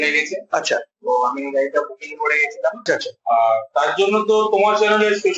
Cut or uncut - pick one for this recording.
cut